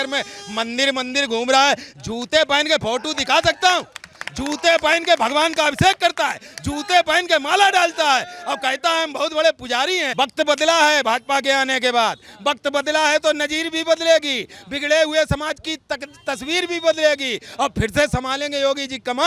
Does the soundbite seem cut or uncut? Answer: cut